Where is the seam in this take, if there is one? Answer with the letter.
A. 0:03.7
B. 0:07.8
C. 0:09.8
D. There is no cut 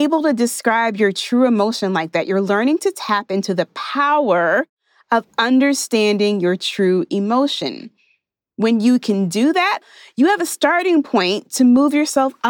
C